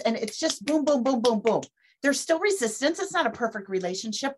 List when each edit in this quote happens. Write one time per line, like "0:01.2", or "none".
0:01.8